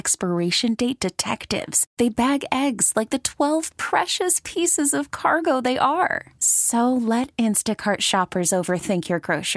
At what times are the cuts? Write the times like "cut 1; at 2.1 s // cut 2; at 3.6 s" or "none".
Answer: none